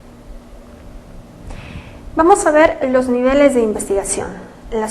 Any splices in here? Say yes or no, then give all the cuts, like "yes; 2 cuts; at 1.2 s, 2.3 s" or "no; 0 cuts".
yes; 1 cut; at 1.2 s